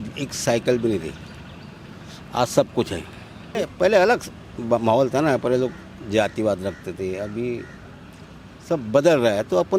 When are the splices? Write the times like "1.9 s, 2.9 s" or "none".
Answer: 3.6 s